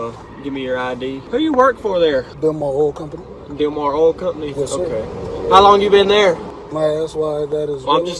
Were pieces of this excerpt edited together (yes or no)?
yes